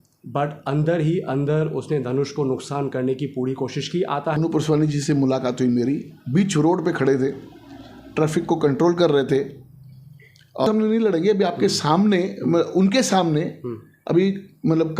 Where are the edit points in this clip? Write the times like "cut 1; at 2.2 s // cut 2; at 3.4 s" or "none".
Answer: cut 1; at 4.4 s // cut 2; at 10.6 s